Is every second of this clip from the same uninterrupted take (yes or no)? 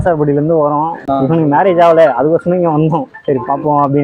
no